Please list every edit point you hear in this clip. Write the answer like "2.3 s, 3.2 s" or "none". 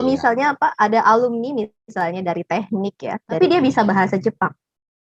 3.4 s